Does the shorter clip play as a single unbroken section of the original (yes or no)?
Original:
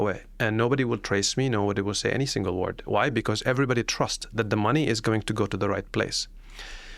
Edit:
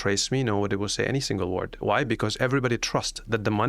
yes